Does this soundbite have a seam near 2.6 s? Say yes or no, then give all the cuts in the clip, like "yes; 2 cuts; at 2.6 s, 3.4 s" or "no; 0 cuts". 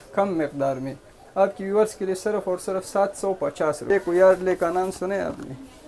no; 1 cut; at 3.9 s